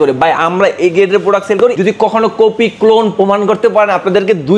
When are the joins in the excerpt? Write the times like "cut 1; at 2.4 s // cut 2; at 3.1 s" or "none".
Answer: cut 1; at 1.8 s

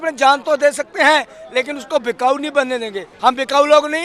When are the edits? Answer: cut 1; at 3.1 s

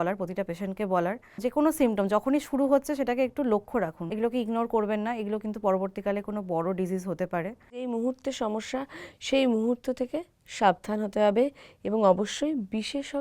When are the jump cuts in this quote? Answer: cut 1; at 1.4 s // cut 2; at 4.1 s // cut 3; at 7.9 s

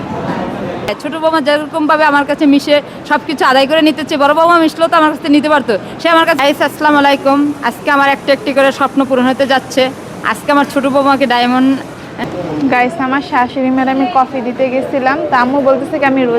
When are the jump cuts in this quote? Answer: cut 1; at 0.9 s // cut 2; at 6.4 s // cut 3; at 12.1 s

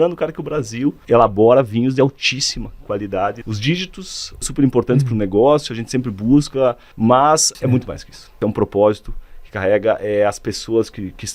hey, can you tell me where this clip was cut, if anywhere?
cut 1; at 1.0 s // cut 2; at 3.4 s // cut 3; at 4.5 s // cut 4; at 6.9 s // cut 5; at 7.8 s

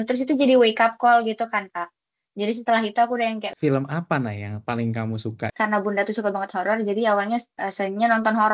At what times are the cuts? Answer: cut 1; at 3.5 s // cut 2; at 5.5 s

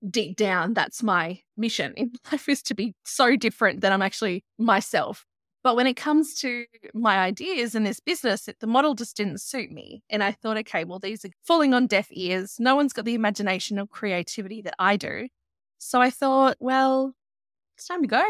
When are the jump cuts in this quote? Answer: cut 1; at 1.4 s // cut 2; at 4.5 s // cut 3; at 5.3 s // cut 4; at 11.2 s

